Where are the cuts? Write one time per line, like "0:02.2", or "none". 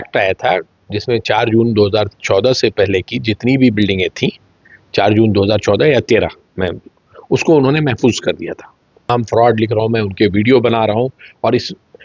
0:09.1

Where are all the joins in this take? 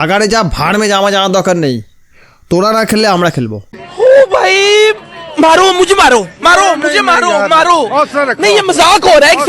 none

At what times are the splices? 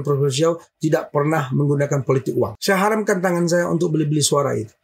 0:02.5

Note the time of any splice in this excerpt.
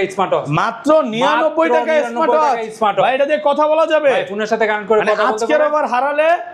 none

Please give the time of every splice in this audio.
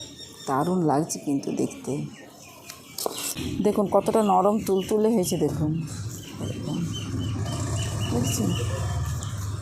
0:03.3

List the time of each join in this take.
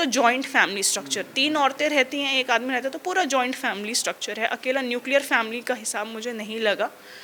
none

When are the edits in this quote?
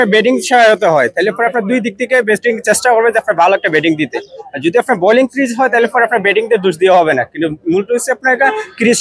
none

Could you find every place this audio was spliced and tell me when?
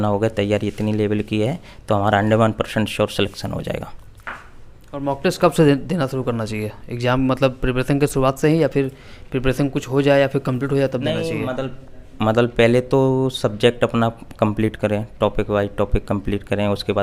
none

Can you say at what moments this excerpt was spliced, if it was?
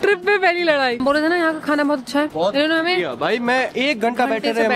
0:01.0
0:02.3

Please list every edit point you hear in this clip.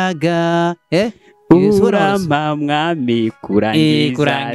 none

